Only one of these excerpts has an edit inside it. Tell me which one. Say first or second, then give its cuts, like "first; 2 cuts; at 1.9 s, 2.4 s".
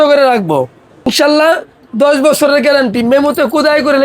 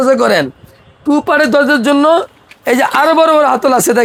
first; 1 cut; at 1.1 s